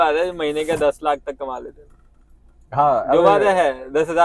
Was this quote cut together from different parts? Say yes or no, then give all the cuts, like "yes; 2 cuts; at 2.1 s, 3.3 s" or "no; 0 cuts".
no; 0 cuts